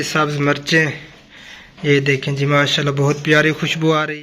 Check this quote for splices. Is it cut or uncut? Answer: uncut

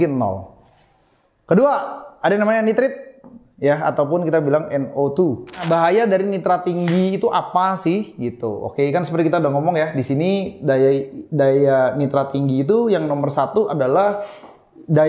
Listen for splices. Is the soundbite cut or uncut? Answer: cut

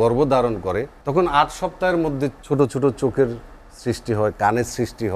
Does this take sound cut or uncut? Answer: cut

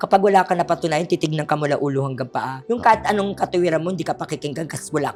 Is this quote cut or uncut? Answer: uncut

